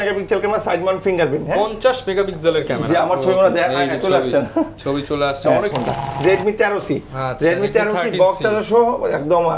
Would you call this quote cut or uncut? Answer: cut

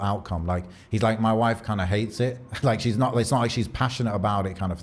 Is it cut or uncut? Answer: uncut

